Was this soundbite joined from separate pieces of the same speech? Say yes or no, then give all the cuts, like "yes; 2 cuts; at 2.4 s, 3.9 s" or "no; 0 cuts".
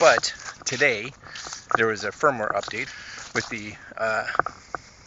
yes; 1 cut; at 2.8 s